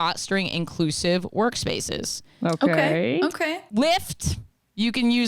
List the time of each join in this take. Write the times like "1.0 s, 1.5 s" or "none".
3.6 s